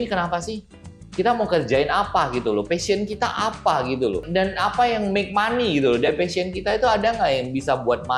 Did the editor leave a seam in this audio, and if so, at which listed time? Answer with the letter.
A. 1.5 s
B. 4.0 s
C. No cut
C